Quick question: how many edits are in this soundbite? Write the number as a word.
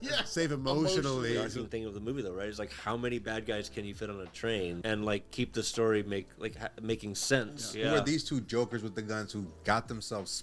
three